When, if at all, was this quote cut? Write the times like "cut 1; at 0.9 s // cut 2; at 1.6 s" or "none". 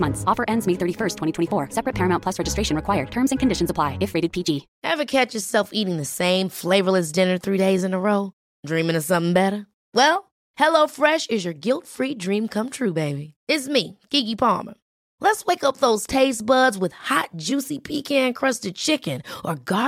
cut 1; at 4.7 s